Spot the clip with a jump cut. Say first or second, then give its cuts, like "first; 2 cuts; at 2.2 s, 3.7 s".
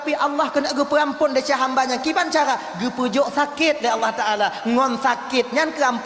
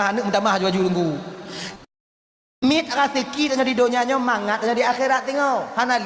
second; 1 cut; at 2.6 s